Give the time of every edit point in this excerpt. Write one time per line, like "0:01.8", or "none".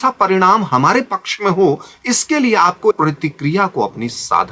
0:02.9